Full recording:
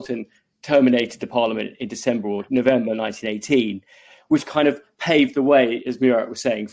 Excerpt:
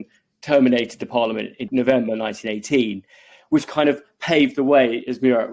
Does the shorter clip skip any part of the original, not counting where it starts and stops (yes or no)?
yes